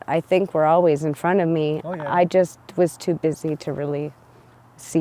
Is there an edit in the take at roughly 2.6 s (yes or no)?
no